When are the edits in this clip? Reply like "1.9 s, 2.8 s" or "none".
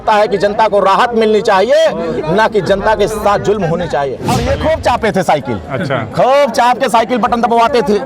4.3 s